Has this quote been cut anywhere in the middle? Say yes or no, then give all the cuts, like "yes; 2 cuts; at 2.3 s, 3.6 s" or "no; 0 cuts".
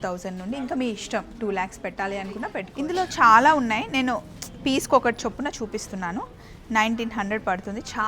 yes; 1 cut; at 2.7 s